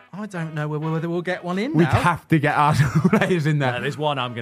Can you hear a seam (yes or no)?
no